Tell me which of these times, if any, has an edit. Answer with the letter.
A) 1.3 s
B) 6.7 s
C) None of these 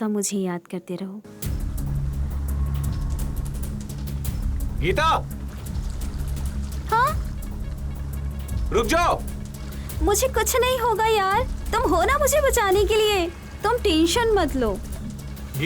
A